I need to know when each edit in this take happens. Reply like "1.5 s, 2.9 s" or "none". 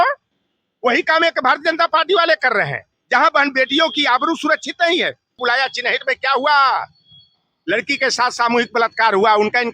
5.4 s